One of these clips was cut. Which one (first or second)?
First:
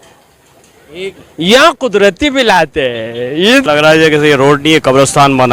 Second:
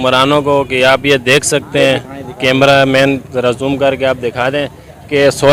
first